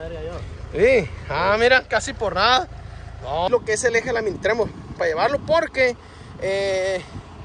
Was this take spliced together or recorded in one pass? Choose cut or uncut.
cut